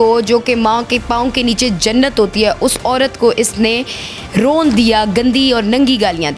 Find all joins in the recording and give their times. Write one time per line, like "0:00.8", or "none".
none